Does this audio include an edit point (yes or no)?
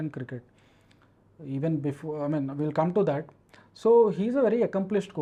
no